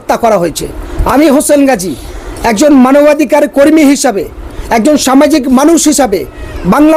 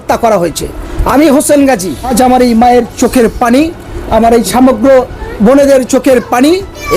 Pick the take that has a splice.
second; 1 cut; at 2.1 s

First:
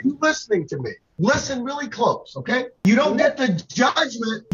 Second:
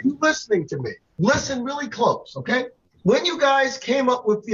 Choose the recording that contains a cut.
first; 1 cut; at 2.8 s

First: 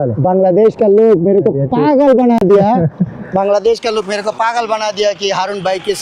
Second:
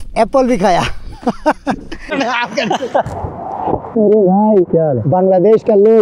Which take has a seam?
second; 1 cut; at 2.1 s

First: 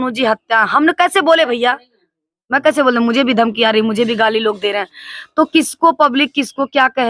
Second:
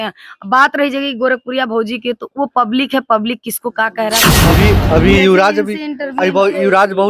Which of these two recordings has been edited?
second; 1 cut; at 4.4 s

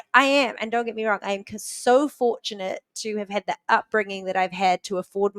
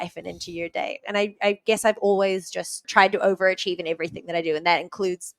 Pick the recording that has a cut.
second; 1 cut; at 2.8 s

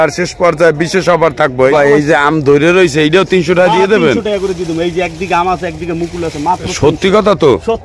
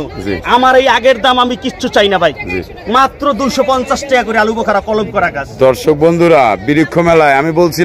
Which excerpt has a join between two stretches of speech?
first; 1 cut; at 1.7 s

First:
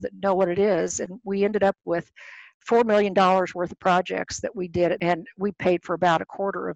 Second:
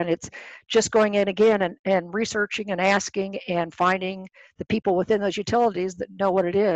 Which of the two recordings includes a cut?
first; 2 cuts; at 2.5 s, 5.0 s

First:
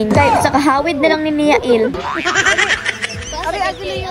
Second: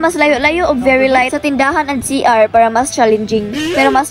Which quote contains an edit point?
first; 1 cut; at 1.9 s

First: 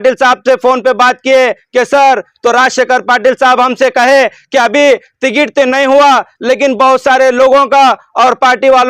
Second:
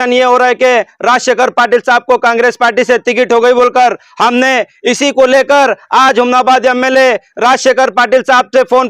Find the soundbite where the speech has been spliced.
first; 1 cut; at 2.3 s

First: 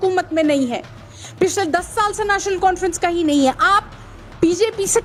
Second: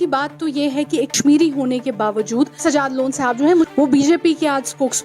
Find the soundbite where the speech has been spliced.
second; 3 cuts; at 1.1 s, 2.5 s, 3.7 s

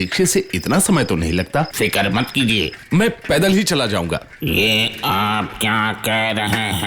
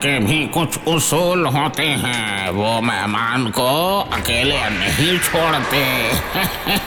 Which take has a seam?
first; 2 cuts; at 1.7 s, 2.8 s

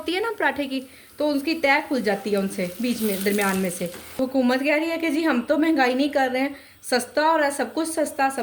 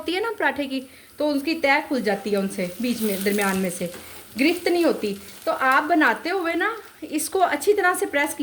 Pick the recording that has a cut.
first; 1 cut; at 4.2 s

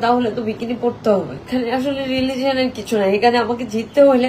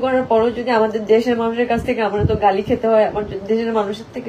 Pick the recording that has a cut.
first; 1 cut; at 1.4 s

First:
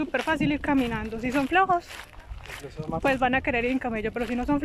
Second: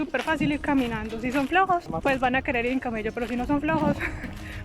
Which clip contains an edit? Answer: second; 1 cut; at 1.9 s

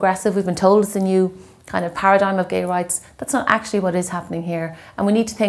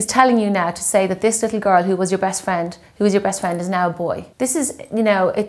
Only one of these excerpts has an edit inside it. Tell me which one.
second; 1 cut; at 4.3 s

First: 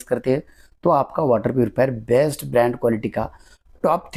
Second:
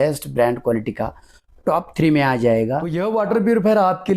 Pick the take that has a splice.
second; 1 cut; at 2.9 s

